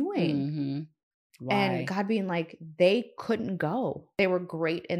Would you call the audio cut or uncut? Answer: cut